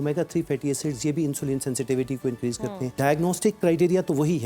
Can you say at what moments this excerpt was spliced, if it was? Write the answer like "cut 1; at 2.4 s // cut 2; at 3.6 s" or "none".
cut 1; at 3.0 s

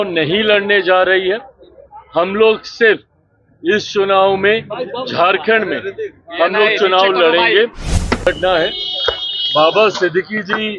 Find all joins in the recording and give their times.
cut 1; at 8.2 s

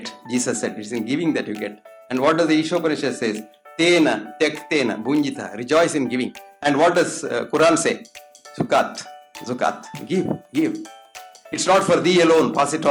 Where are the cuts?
none

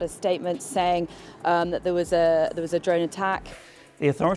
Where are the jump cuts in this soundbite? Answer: cut 1; at 3.5 s

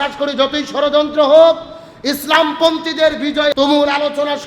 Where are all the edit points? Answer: cut 1; at 3.5 s

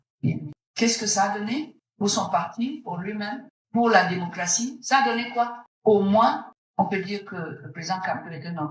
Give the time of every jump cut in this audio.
cut 1; at 5.6 s // cut 2; at 6.6 s

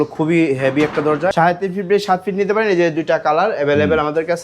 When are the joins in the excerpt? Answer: cut 1; at 1.3 s

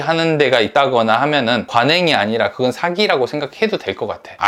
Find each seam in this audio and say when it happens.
none

